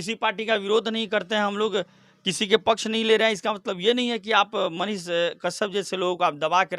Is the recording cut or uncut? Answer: uncut